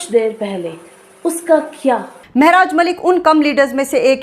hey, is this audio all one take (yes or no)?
no